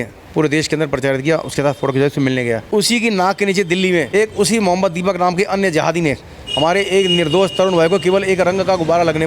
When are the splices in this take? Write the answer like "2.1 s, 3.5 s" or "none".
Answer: 2.6 s, 4.1 s

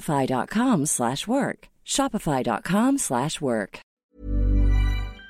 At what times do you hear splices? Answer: 4.1 s

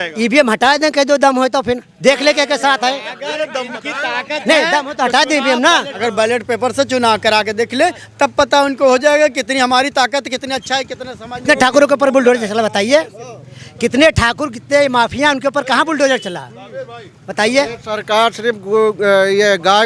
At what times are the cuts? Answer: 5.9 s, 11.4 s

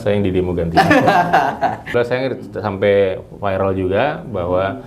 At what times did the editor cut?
1.9 s

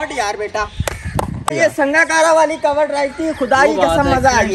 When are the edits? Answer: 1.5 s

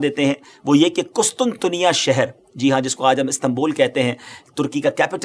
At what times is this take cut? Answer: none

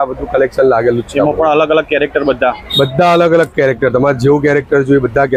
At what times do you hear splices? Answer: none

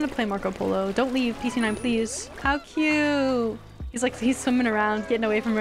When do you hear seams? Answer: 2.4 s

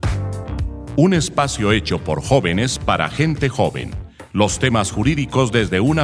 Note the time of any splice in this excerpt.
none

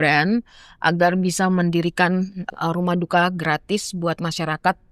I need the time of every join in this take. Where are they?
2.5 s

